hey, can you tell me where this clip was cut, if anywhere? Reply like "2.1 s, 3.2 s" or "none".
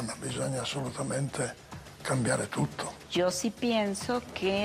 2.9 s

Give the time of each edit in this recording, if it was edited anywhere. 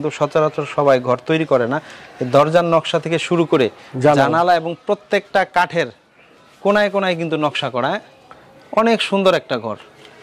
none

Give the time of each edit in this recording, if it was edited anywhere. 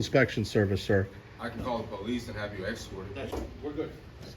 3.3 s

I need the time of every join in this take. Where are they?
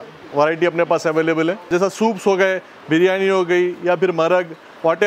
1.7 s

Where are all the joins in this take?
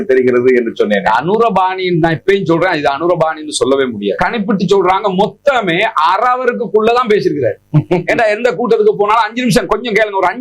4.2 s

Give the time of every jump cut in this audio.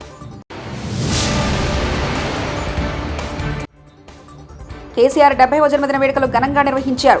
none

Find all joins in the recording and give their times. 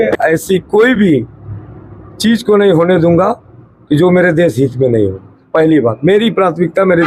none

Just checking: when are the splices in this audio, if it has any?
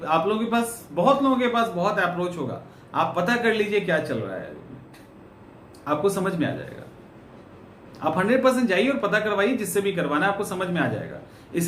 none

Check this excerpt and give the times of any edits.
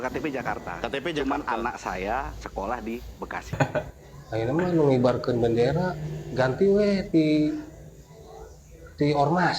3.5 s

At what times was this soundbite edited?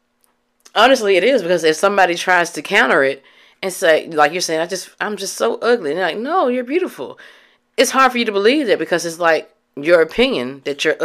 none

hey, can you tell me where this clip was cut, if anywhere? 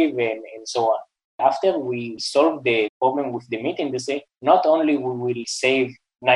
1.4 s, 2.2 s, 2.9 s, 4.3 s, 5.4 s

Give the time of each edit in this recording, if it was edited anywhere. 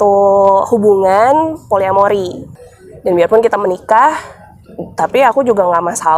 2.6 s

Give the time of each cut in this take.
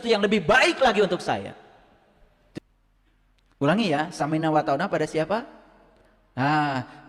2.6 s

